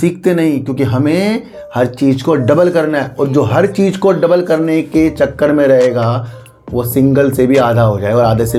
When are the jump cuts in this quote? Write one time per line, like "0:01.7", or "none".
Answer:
none